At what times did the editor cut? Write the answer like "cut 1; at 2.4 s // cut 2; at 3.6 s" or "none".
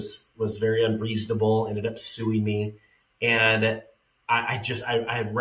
none